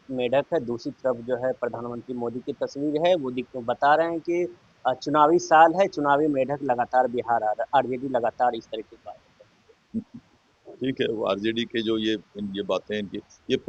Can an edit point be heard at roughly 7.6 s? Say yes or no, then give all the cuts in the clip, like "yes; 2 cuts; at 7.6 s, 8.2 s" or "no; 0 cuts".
no; 0 cuts